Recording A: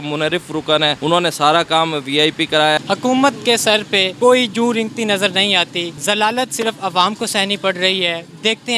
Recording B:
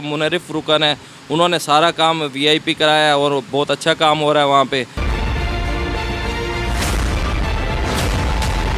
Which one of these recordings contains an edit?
A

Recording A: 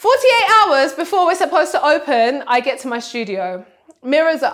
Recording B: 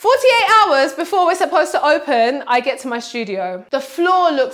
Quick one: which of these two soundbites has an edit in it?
B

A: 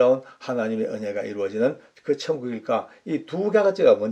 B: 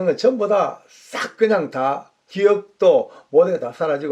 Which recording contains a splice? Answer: B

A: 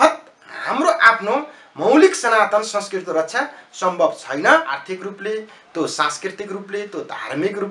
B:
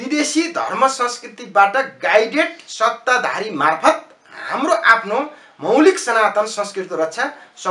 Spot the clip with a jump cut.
A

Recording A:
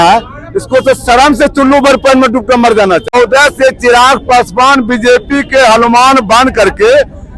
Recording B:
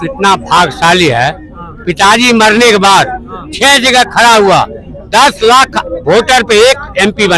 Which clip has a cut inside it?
A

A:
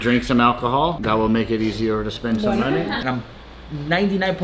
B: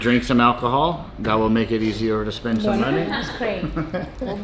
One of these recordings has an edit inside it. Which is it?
A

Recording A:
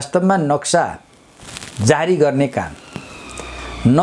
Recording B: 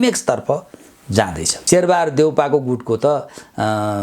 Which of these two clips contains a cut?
B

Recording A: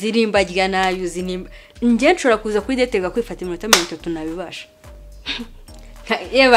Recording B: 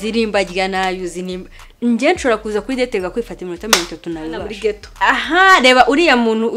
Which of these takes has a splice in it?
B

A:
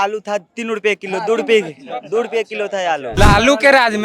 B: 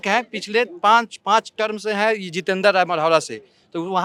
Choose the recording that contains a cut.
A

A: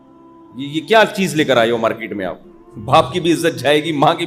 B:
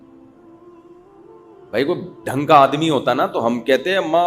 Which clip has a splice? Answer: B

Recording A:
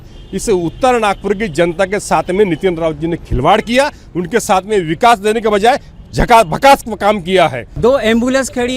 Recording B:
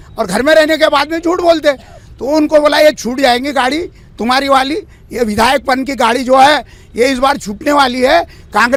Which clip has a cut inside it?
A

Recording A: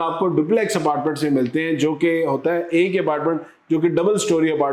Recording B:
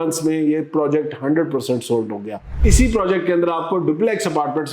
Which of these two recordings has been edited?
B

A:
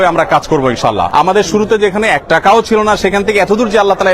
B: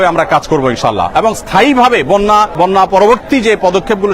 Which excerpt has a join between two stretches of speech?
A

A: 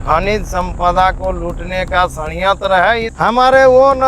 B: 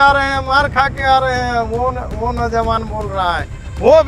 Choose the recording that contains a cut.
A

